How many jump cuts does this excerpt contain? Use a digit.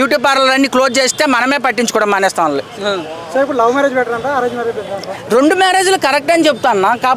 0